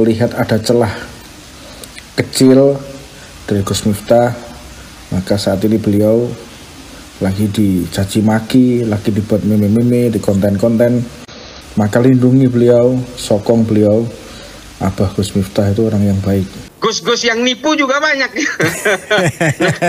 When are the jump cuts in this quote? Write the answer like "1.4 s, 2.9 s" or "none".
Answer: 16.6 s